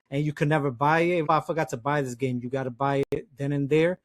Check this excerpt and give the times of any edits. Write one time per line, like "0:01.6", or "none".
0:01.3

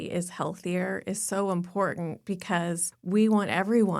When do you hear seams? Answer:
0:02.9

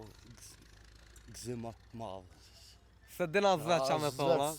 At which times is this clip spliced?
none

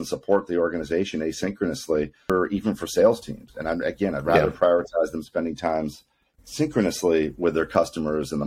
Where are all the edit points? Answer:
0:02.3

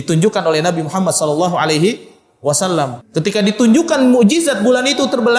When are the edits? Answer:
0:03.0

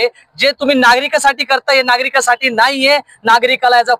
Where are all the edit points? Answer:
none

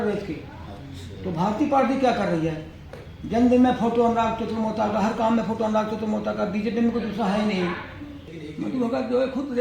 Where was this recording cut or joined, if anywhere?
0:08.2

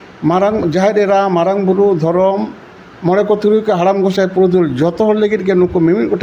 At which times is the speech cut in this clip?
none

